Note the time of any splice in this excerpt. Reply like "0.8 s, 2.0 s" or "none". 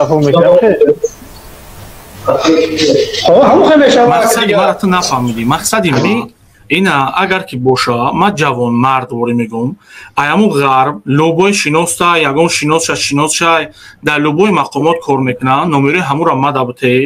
4.8 s